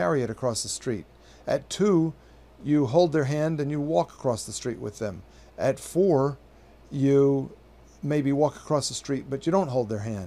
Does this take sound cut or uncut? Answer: cut